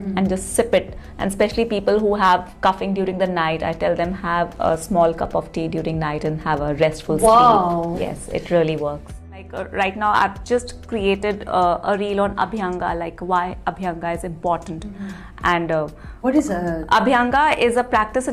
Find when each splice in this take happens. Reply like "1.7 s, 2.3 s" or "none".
9.6 s